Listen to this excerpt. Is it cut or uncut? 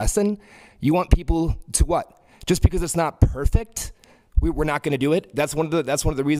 uncut